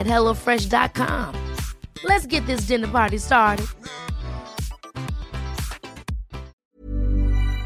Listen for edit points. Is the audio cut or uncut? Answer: cut